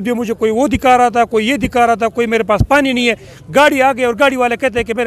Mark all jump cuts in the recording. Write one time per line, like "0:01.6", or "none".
none